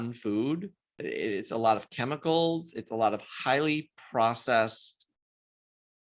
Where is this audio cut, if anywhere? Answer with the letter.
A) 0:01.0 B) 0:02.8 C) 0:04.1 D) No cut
A